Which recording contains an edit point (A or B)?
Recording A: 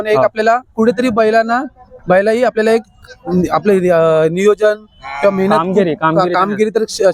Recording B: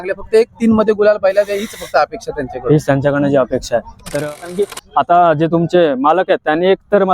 B